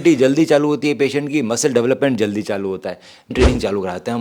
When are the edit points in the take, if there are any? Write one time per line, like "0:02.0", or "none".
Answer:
0:03.3